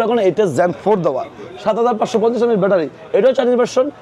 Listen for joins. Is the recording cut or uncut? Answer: uncut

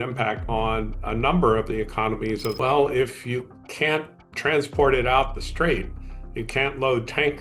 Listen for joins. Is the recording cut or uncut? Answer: cut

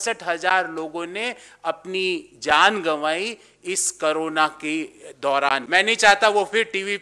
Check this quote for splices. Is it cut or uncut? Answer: cut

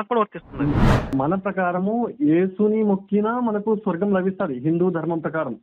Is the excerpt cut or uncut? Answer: cut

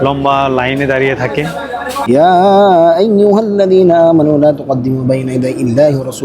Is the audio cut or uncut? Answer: cut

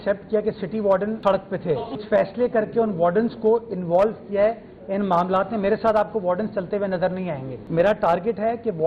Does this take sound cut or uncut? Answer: cut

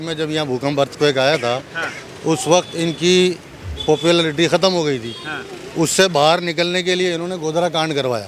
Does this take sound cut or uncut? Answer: uncut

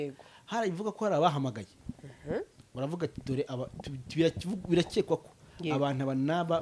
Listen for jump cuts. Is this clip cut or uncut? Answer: uncut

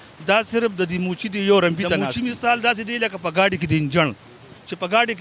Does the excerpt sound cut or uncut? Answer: cut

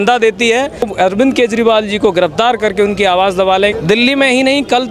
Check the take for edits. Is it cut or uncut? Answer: cut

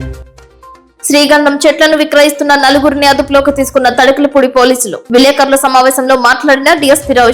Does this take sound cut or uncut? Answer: cut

